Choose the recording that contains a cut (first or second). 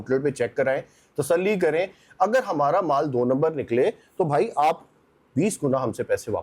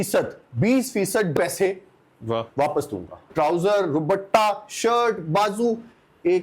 second